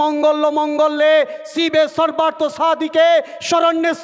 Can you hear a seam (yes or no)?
no